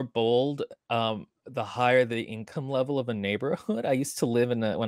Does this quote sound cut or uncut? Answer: uncut